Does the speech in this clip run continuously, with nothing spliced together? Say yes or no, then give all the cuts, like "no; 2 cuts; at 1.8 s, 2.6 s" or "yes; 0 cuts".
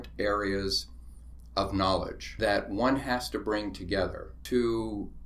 no; 2 cuts; at 2.2 s, 4.3 s